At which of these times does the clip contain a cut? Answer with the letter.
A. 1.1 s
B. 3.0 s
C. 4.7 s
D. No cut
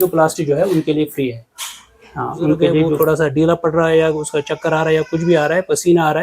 B